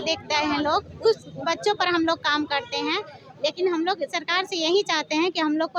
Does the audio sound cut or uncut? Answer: uncut